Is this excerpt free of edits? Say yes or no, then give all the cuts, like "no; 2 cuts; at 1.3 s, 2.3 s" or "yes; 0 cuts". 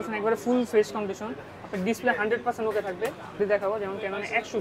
no; 1 cut; at 3.4 s